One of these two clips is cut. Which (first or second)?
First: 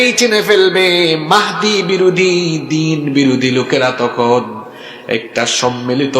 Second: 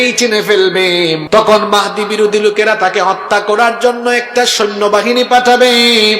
second